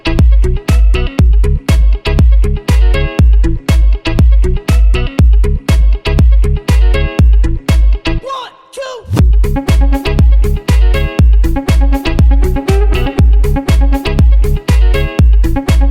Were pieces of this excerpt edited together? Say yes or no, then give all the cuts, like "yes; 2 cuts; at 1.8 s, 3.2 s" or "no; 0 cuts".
yes; 1 cut; at 13.2 s